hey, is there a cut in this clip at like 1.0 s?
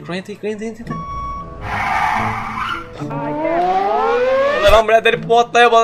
yes; 2 cuts; at 1.0 s, 4.6 s

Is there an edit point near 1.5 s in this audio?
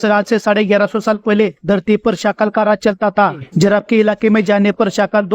no; 1 cut; at 3.4 s

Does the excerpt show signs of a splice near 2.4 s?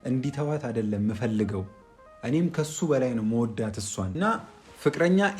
no; 1 cut; at 4.4 s

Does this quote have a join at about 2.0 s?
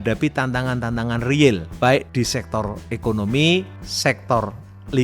yes; 2 cuts; at 2.0 s, 3.8 s

